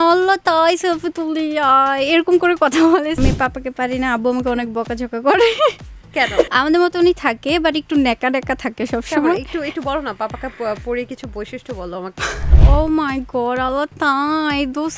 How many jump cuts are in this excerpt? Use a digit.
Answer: 3